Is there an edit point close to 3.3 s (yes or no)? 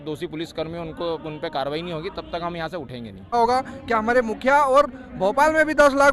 yes